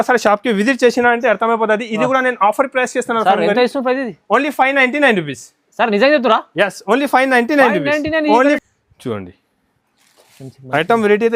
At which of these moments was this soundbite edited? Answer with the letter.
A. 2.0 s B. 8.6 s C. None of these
B